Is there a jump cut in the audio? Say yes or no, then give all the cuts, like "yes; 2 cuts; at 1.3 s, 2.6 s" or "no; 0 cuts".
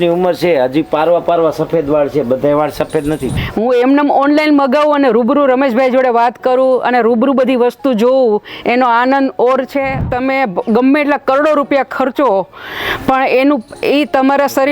yes; 2 cuts; at 3.3 s, 10.1 s